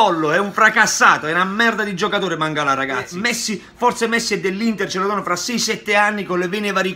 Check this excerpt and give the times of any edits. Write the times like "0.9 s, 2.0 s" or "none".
3.1 s